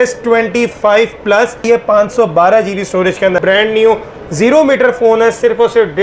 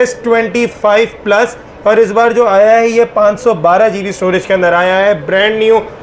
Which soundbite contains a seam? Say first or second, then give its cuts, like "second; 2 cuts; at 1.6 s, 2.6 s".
first; 2 cuts; at 1.6 s, 3.4 s